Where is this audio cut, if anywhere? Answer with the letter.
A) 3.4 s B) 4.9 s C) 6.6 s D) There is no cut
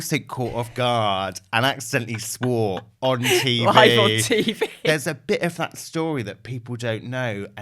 B